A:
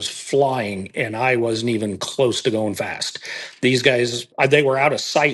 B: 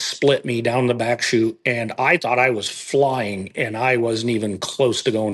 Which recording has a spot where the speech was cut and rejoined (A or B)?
A